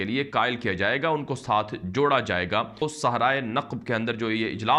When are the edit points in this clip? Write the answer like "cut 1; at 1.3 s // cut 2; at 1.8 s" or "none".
none